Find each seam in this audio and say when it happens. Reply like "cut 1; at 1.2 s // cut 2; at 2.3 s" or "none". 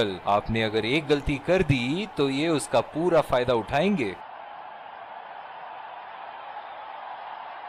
cut 1; at 4.2 s